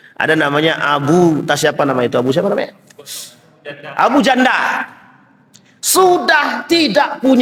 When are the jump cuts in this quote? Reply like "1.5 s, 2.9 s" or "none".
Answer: none